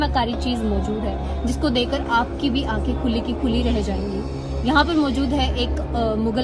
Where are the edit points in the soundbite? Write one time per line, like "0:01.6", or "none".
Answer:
none